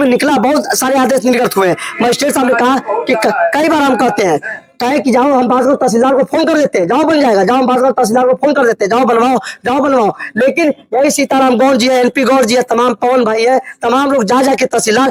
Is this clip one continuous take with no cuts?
yes; 0 cuts

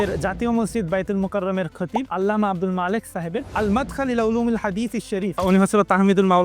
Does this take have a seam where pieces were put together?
yes; 3 cuts; at 2.1 s, 3.4 s, 5.4 s

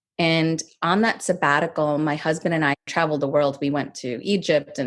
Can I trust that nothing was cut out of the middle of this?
no; 1 cut; at 2.9 s

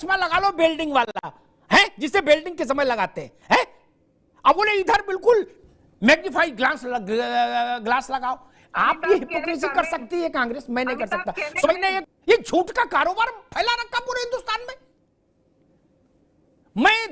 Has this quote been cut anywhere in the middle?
yes; 2 cuts; at 12.1 s, 15.6 s

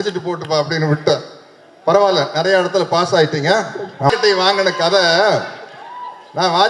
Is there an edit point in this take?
yes; 1 cut; at 4.1 s

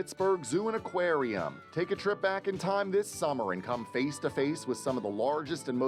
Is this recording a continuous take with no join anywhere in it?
yes; 0 cuts

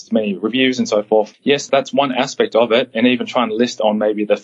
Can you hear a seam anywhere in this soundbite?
no; 0 cuts

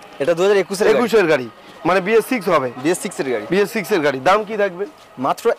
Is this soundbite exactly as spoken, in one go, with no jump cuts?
yes; 0 cuts

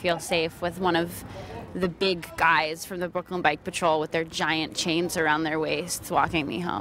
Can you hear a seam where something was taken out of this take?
no; 0 cuts

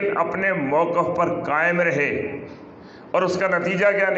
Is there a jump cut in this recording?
no; 0 cuts

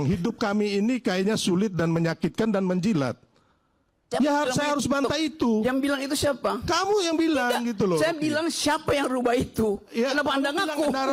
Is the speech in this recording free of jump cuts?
yes; 0 cuts

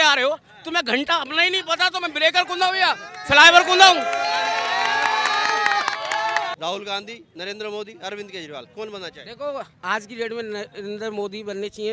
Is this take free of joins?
no; 2 cuts; at 6.5 s, 9.7 s

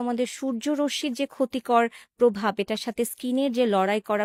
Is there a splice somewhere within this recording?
no; 0 cuts

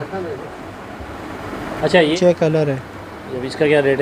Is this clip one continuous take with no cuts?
no; 1 cut; at 2.1 s

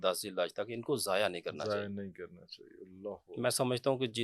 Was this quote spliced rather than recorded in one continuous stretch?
no; 0 cuts

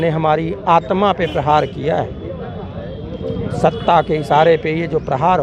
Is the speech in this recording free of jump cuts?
yes; 0 cuts

